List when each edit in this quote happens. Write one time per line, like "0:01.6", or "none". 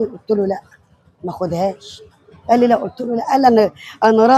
none

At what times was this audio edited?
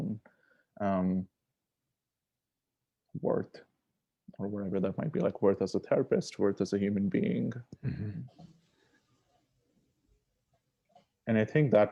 none

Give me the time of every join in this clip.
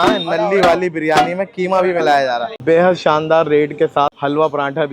0:02.5

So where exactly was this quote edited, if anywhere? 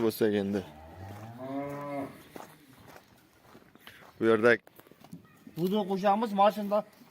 0:04.6

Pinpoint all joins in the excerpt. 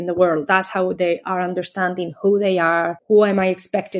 0:03.0

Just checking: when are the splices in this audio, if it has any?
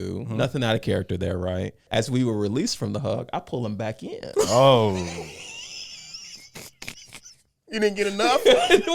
0:01.8

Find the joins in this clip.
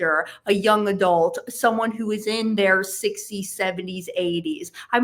none

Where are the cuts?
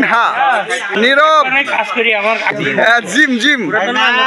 0:01.0
0:02.6

